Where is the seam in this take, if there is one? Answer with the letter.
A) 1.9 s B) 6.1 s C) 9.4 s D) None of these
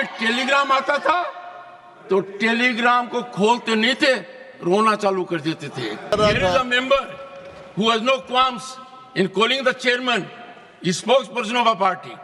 B